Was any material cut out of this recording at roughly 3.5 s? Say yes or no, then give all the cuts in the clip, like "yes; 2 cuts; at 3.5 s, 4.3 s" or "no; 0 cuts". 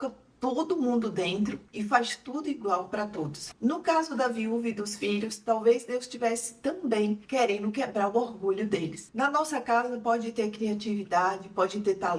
yes; 2 cuts; at 3.5 s, 9.0 s